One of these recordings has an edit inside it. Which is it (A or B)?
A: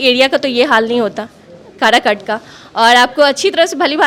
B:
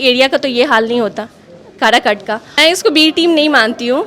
B